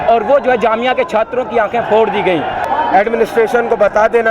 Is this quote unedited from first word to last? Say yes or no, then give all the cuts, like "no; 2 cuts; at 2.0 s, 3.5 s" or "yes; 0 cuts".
no; 1 cut; at 2.6 s